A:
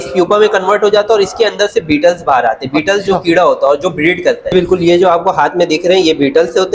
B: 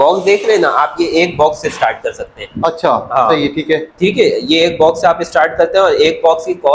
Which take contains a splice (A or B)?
A